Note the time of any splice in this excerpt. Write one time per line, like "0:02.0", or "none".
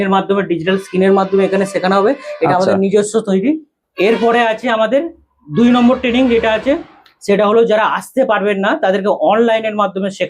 0:03.8